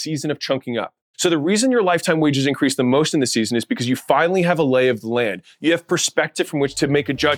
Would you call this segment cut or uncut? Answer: cut